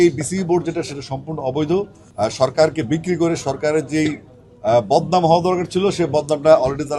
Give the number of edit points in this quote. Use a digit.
1